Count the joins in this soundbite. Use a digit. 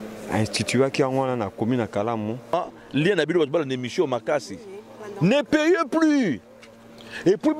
1